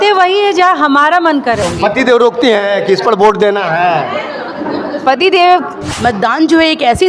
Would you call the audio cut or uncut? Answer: cut